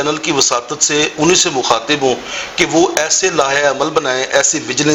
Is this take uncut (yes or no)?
yes